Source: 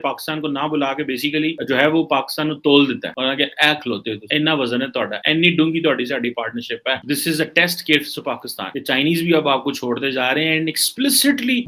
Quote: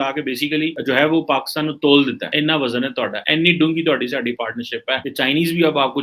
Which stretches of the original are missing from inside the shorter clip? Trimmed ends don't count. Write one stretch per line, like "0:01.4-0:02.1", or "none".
0:03.1-0:04.2
0:07.0-0:08.7